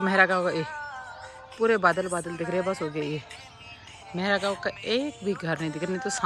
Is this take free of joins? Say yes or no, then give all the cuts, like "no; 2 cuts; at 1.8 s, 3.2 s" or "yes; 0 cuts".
yes; 0 cuts